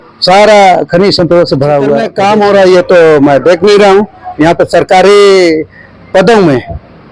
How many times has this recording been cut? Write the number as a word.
one